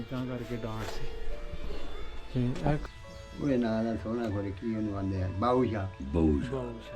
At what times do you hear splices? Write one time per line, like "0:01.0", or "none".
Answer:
0:02.8